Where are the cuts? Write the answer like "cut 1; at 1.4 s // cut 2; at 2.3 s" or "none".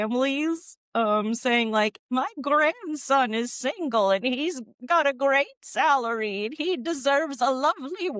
none